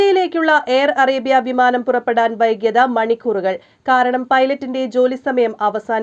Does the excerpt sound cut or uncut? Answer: uncut